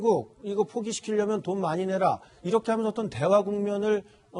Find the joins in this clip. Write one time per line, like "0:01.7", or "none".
none